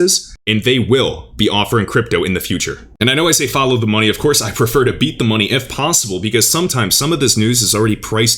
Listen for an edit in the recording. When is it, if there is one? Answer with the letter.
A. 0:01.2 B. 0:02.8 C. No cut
B